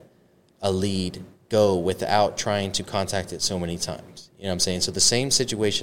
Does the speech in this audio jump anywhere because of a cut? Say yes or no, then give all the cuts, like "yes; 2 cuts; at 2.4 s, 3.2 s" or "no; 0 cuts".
no; 0 cuts